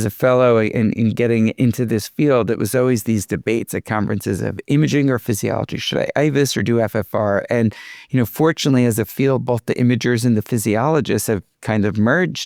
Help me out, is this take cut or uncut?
uncut